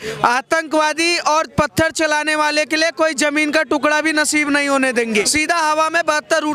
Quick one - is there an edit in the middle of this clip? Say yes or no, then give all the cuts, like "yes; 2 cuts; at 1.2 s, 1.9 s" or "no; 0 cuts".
yes; 1 cut; at 5.3 s